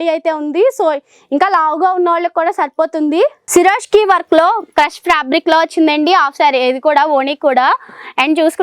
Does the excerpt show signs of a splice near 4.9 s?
no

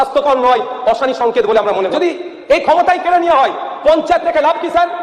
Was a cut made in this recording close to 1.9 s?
yes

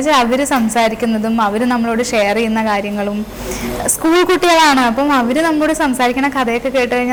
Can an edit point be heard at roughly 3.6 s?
no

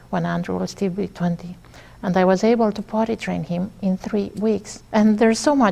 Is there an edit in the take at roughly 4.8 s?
yes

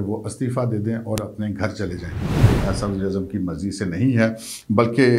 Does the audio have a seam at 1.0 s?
no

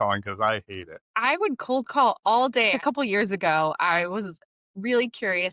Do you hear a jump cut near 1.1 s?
yes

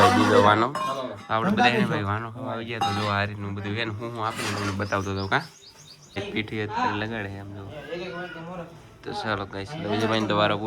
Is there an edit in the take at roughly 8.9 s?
no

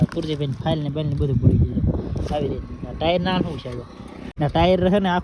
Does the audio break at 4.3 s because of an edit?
yes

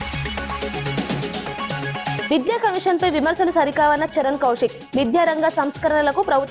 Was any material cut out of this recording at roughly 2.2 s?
no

